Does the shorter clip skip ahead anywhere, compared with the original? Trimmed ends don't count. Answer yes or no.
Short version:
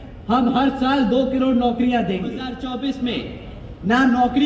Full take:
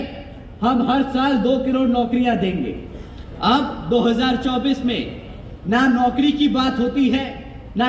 yes